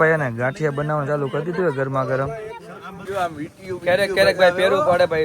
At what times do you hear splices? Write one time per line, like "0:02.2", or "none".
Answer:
0:03.0

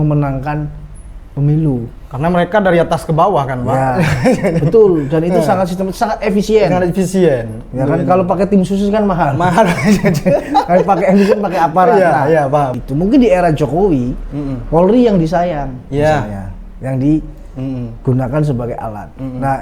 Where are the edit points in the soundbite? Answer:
0:12.8

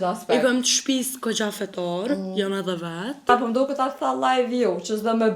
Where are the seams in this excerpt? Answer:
0:03.3

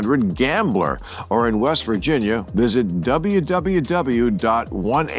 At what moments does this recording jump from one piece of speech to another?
0:02.4

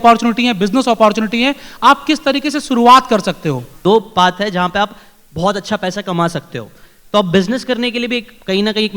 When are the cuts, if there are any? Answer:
0:03.7

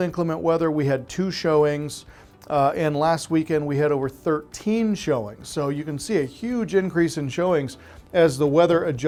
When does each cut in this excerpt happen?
none

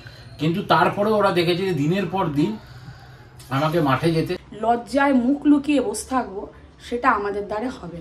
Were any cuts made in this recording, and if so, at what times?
0:04.4

